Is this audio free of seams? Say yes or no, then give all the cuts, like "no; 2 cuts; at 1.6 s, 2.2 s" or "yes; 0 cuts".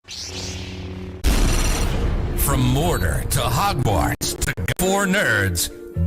no; 1 cut; at 4.6 s